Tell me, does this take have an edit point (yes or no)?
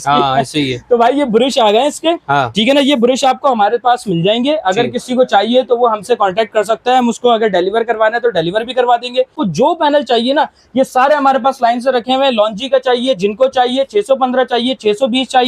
yes